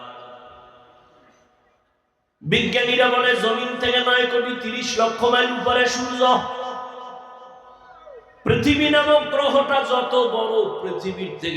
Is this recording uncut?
yes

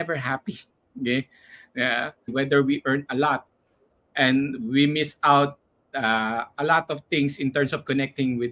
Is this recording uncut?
no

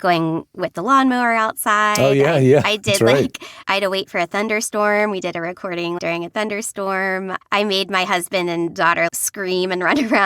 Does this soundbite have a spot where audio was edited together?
yes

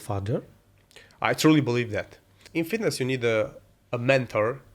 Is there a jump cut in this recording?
yes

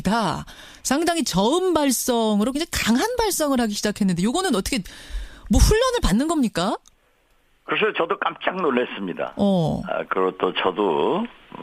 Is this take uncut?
no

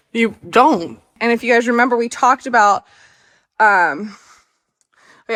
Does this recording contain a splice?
no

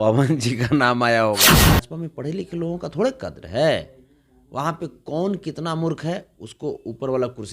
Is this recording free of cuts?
no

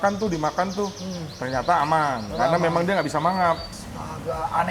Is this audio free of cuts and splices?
no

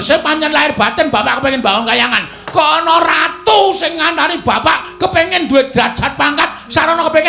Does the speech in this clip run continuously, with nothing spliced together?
yes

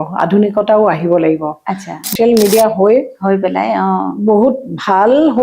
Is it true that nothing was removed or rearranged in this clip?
no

